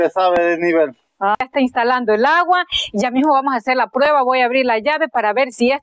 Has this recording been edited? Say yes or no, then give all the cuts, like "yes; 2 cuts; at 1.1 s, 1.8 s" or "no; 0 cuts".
yes; 1 cut; at 1.4 s